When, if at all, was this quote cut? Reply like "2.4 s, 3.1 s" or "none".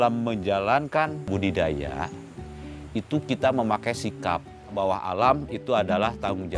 1.3 s, 4.7 s